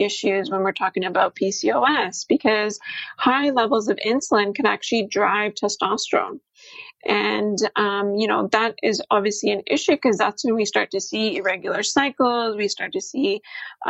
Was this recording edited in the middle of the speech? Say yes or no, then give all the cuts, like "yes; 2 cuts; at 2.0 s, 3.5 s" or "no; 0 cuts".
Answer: no; 0 cuts